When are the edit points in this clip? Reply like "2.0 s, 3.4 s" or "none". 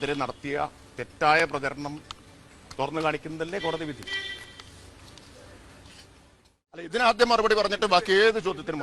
6.9 s